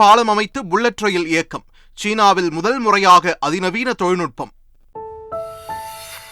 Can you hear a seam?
yes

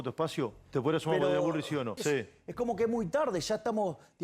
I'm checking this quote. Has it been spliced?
yes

